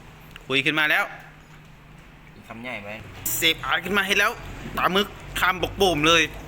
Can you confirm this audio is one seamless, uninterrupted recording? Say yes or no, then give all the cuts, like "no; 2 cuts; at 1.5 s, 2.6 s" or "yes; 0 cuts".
no; 1 cut; at 3.3 s